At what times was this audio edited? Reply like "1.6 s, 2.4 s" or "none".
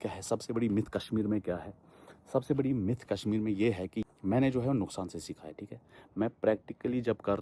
4.0 s